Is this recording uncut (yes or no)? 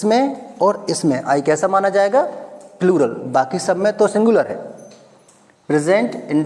yes